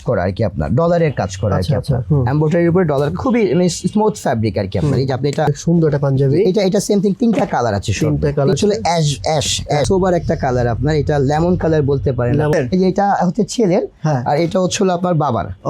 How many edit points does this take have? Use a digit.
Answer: 4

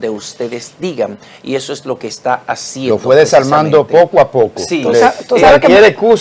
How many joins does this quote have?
0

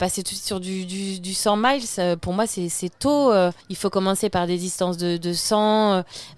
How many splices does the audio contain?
1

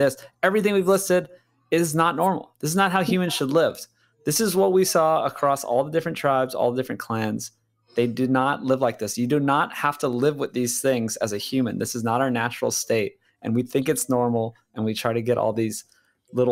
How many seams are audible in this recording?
0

